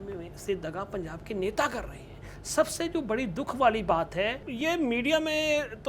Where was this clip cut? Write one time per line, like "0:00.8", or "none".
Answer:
0:04.4